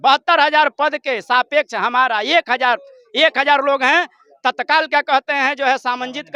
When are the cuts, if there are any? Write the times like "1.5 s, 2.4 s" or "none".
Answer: none